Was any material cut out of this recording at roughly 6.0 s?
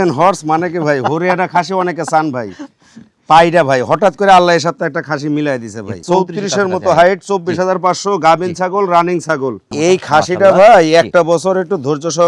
yes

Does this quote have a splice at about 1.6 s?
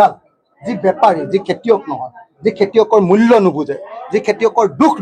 no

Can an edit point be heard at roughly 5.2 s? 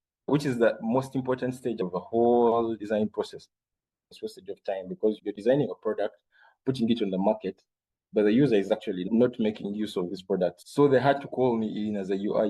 no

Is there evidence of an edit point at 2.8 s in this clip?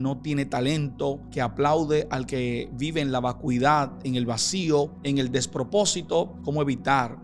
no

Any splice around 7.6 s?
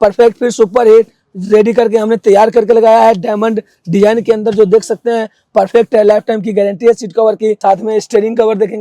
yes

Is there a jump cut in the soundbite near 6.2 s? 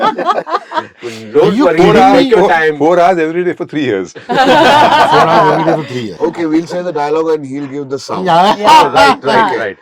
yes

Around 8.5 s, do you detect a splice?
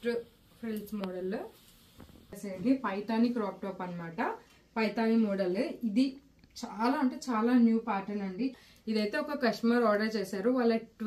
yes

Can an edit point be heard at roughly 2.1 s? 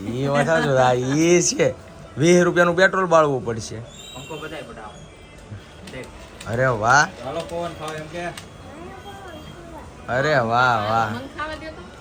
no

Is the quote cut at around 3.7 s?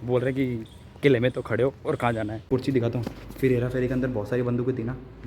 no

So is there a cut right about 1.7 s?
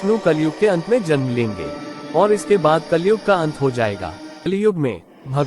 no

